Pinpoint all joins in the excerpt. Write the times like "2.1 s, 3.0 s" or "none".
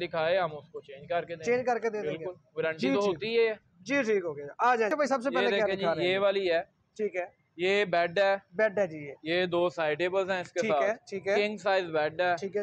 4.9 s